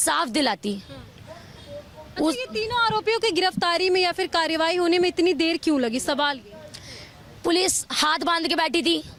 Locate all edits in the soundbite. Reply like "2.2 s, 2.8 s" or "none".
none